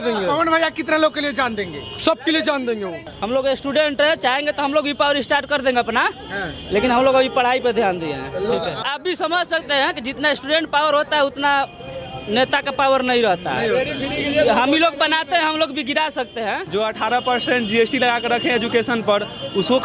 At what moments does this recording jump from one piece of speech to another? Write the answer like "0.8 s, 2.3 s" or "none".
3.0 s, 8.8 s, 16.6 s